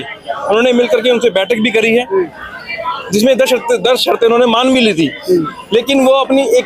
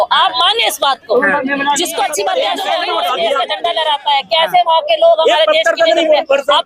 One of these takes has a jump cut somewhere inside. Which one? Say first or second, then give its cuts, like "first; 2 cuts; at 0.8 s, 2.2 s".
second; 1 cut; at 2.7 s